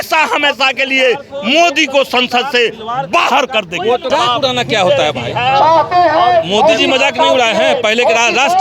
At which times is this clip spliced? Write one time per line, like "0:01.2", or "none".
0:04.1